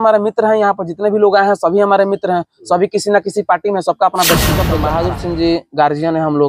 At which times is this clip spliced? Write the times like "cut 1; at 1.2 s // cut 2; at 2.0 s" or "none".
cut 1; at 4.8 s